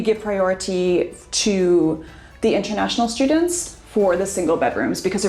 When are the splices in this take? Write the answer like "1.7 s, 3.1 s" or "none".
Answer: none